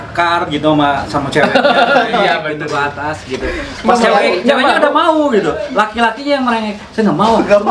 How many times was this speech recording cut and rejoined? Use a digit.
0